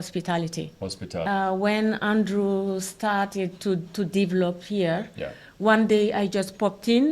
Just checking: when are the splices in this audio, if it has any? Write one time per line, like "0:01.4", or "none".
0:01.2